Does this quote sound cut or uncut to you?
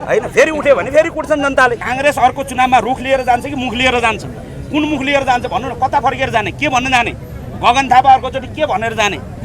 cut